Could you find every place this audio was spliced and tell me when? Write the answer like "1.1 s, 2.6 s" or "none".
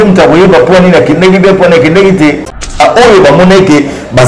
2.8 s

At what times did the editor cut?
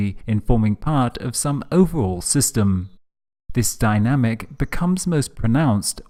none

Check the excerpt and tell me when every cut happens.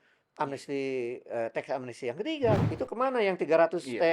2.6 s

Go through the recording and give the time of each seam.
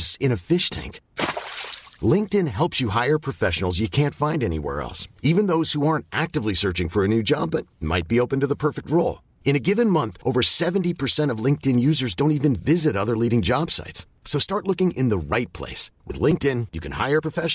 none

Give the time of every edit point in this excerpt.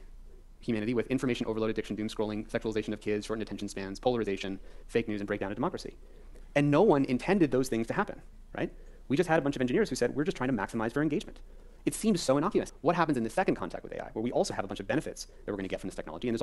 12.7 s

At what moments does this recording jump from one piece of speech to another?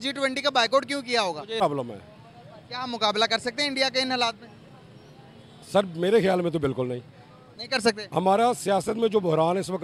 1.6 s

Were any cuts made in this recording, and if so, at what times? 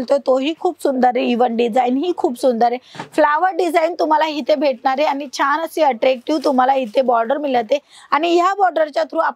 none

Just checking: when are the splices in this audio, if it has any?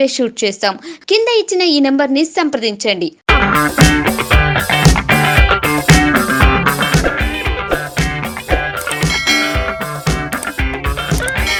none

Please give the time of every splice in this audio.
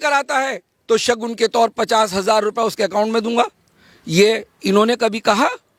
none

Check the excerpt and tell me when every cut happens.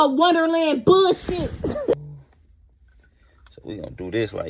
1.9 s

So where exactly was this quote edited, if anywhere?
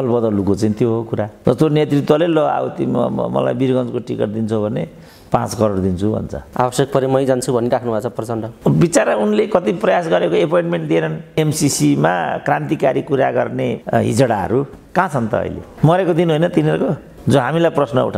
1.3 s, 6.4 s, 11.4 s

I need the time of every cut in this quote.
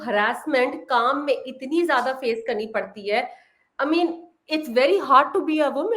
none

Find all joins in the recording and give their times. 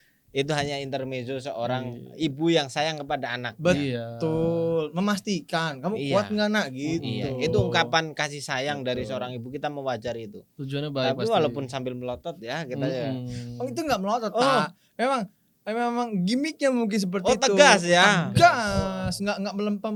none

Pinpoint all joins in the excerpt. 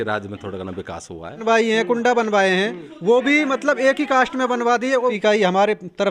1.4 s, 5.2 s

